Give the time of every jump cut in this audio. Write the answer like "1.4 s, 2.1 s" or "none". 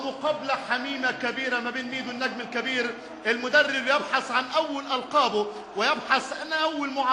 1.2 s